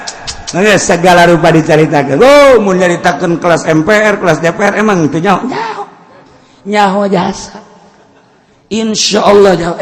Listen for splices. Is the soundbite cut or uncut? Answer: uncut